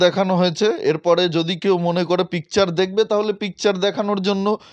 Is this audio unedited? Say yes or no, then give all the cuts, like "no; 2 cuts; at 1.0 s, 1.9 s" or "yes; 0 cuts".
yes; 0 cuts